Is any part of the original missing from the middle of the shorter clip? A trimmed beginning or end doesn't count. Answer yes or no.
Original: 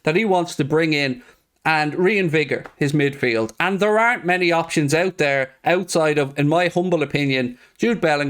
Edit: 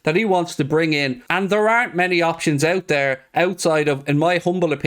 yes